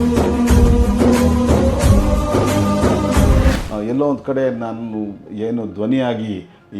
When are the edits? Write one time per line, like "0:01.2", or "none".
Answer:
0:03.7